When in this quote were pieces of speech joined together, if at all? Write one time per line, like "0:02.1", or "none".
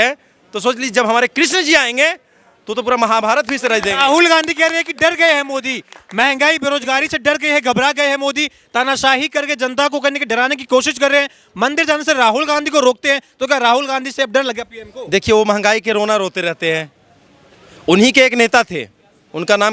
none

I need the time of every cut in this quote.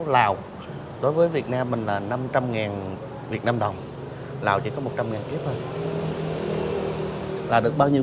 none

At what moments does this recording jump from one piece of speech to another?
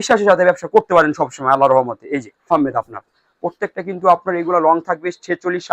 0:02.5

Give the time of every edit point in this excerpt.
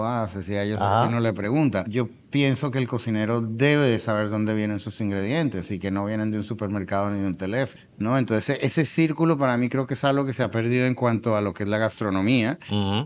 0:01.9
0:07.8

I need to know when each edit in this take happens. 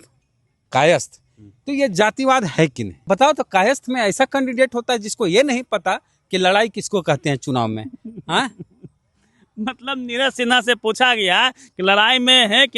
0:03.0

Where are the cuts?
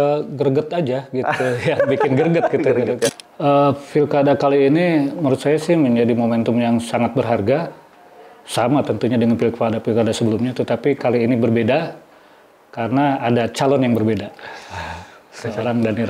0:03.1

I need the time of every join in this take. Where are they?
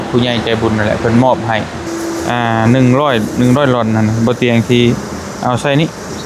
0:01.8

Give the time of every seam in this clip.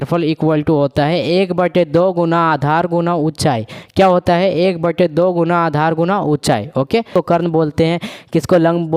0:07.1

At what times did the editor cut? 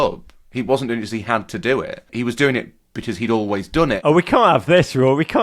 0:02.1
0:04.0

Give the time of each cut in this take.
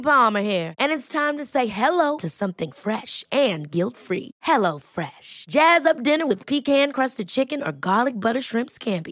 none

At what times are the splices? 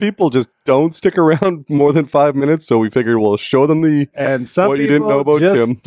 none

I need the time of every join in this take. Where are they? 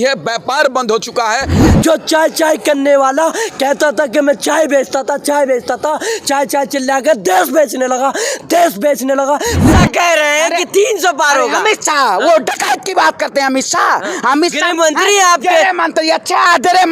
0:01.6
0:09.6

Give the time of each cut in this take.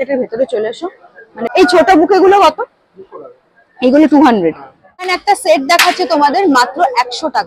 0:01.5
0:05.1

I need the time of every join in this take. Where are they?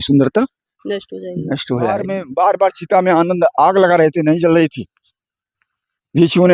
0:02.2

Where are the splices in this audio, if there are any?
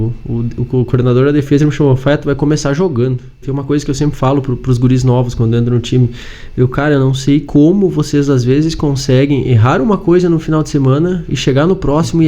0:03.4

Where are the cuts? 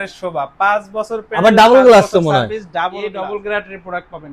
0:03.0

